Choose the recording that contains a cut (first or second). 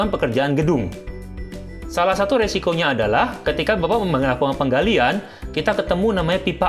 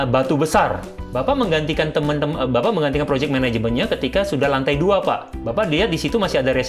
second